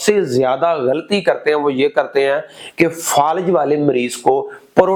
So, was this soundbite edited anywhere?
no; 0 cuts

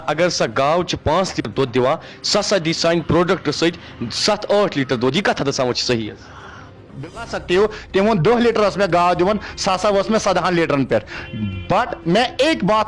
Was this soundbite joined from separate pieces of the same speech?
yes; 2 cuts; at 1.5 s, 6.9 s

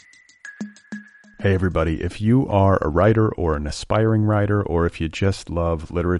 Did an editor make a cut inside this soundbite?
yes; 1 cut; at 1.0 s

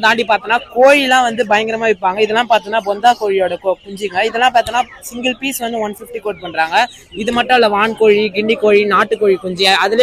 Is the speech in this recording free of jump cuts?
yes; 0 cuts

